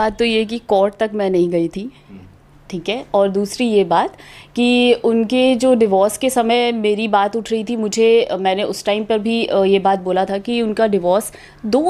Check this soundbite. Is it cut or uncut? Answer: uncut